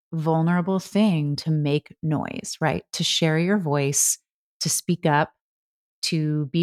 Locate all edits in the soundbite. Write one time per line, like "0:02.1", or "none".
none